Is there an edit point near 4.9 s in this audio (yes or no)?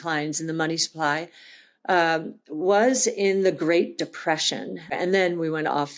yes